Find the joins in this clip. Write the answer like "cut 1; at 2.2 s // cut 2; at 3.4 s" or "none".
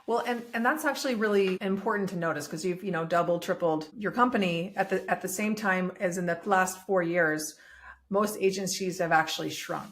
cut 1; at 1.6 s // cut 2; at 3.9 s